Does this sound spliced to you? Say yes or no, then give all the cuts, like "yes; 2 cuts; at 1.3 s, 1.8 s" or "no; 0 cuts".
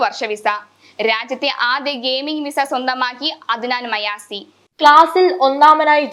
no; 0 cuts